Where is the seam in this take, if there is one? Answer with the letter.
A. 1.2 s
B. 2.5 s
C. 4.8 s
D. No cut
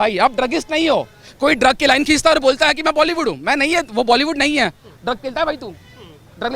D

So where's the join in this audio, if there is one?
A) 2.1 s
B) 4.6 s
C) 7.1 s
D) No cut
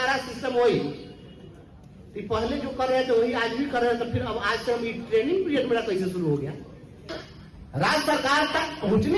C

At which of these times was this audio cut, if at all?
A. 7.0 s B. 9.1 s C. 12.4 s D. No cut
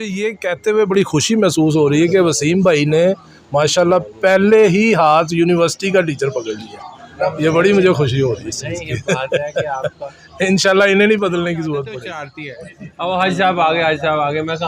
C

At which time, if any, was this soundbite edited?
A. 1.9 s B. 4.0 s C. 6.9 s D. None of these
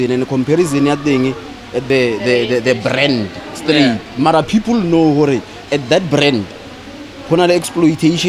A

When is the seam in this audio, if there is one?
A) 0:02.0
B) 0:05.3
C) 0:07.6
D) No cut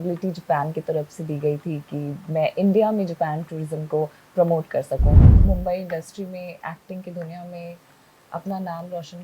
B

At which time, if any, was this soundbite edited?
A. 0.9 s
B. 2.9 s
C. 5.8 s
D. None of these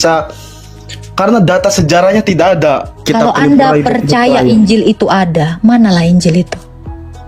B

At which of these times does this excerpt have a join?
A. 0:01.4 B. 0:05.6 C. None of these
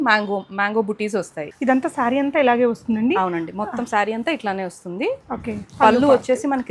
A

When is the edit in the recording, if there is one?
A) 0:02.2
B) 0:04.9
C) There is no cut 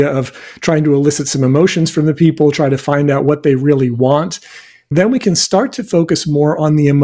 B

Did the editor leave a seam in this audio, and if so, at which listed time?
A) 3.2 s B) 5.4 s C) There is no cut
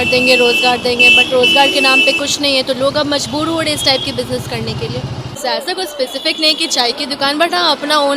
B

